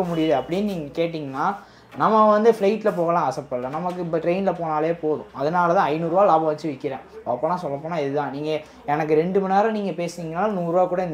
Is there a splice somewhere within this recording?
no; 0 cuts

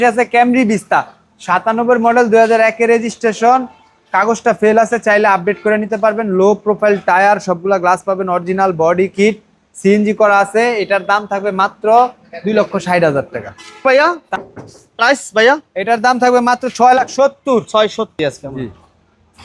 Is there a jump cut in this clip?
yes; 2 cuts; at 14.3 s, 18.2 s

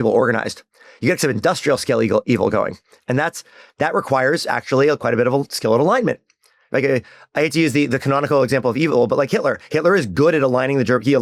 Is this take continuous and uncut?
yes; 0 cuts

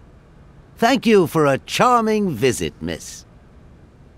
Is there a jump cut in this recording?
yes; 2 cuts; at 0.7 s, 3.3 s

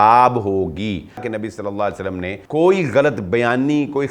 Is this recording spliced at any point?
yes; 2 cuts; at 1.3 s, 2.4 s

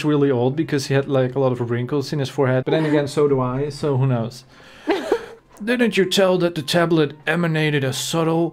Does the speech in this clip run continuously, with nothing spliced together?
yes; 0 cuts

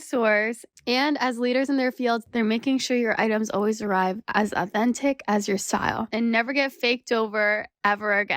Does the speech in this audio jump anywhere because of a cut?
yes; 1 cut; at 6.1 s

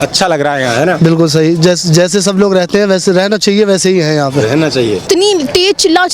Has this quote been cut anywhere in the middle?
yes; 1 cut; at 5.1 s

